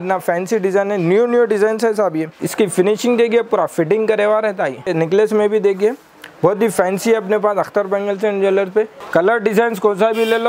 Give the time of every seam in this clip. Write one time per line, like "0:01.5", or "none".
0:02.4
0:04.9
0:09.0